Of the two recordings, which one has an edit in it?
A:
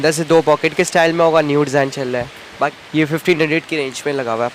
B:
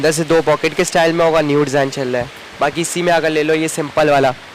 A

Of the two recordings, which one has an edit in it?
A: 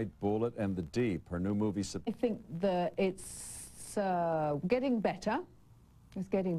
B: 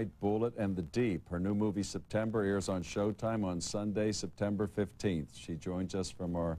B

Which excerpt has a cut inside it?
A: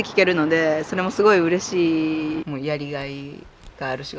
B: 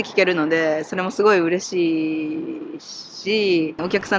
A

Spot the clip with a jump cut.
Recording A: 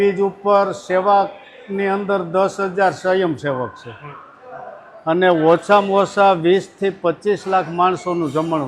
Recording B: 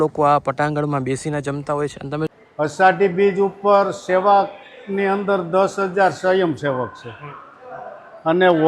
B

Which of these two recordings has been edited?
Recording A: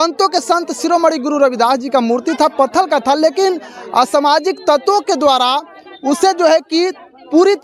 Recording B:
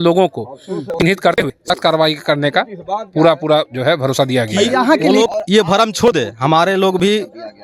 B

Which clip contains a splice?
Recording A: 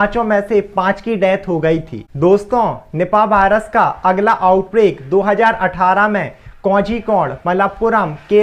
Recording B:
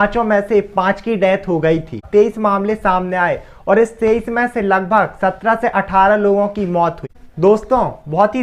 B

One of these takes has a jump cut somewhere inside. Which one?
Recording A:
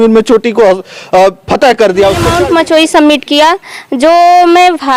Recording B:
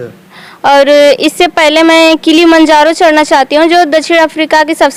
A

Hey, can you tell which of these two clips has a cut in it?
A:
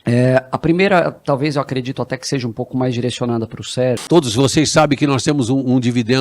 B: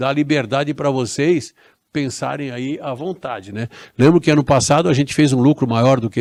A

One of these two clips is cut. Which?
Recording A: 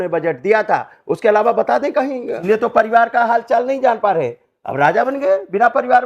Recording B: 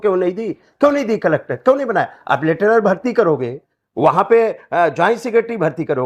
A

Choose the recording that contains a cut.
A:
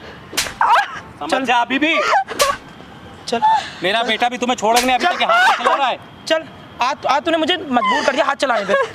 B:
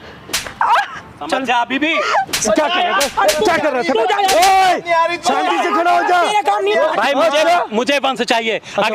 B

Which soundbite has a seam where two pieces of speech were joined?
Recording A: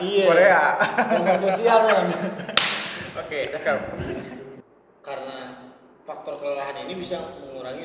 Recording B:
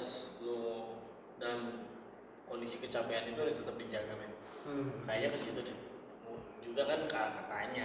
A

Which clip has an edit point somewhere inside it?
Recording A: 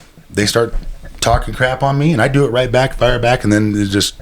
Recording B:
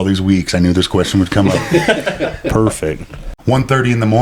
B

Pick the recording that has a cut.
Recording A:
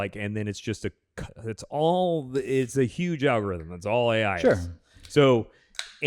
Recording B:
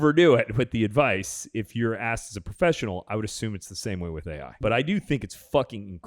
B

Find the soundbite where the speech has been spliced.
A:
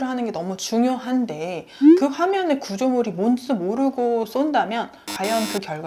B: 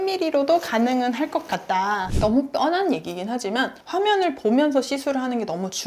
B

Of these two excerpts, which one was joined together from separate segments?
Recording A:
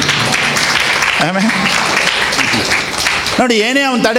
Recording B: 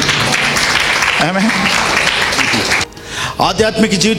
B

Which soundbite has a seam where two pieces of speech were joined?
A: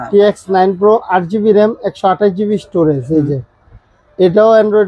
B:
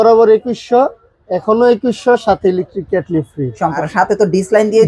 B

